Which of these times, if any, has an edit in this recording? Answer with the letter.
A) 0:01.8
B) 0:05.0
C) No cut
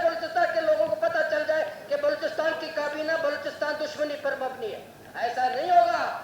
B